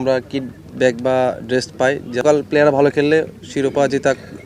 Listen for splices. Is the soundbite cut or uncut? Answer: cut